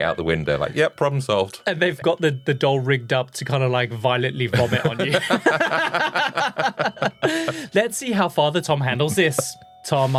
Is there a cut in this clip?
no; 0 cuts

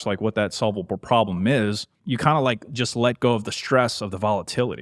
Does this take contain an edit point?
yes; 1 cut; at 1.9 s

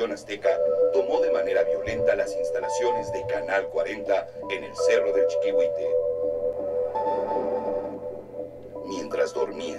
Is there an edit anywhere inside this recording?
no; 0 cuts

